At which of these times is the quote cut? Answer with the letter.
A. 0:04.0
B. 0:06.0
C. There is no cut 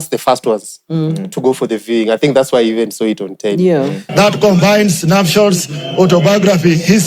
A